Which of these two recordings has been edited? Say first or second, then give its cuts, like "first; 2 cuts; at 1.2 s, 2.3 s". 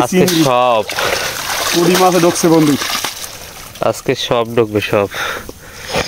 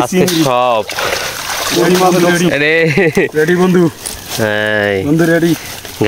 second; 1 cut; at 2.3 s